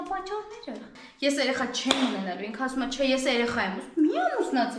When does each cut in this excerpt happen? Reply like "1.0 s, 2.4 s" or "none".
0.9 s